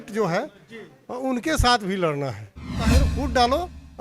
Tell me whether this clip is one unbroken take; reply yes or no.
no